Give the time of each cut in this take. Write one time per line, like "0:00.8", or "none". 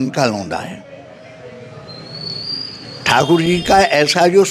none